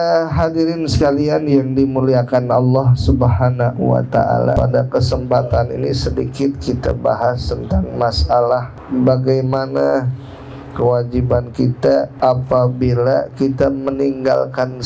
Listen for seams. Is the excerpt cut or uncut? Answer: cut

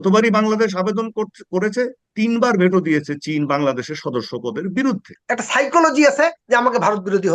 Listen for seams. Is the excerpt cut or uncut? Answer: cut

